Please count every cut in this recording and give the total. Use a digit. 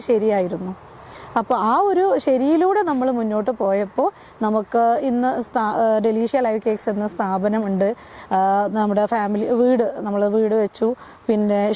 0